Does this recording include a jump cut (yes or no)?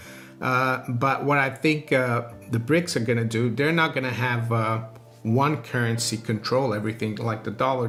no